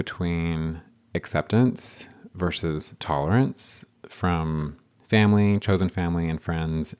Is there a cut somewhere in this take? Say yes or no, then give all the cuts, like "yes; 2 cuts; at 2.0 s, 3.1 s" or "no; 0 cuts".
no; 0 cuts